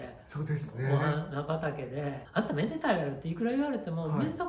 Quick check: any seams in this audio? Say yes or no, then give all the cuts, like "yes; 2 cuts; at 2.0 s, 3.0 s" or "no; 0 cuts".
yes; 1 cut; at 2.2 s